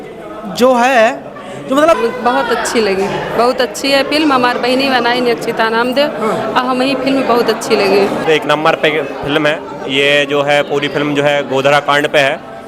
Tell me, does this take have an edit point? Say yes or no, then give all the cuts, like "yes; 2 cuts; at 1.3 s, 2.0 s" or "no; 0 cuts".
yes; 2 cuts; at 2.0 s, 8.2 s